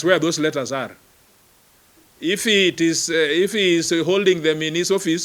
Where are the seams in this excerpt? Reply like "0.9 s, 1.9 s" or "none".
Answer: none